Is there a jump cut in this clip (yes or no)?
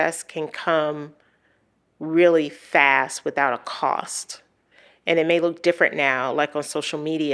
no